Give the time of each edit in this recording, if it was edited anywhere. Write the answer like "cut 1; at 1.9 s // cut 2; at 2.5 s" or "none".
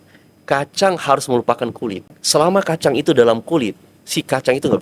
cut 1; at 2.1 s